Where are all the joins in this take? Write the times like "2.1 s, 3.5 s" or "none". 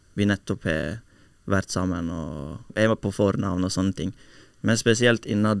2.7 s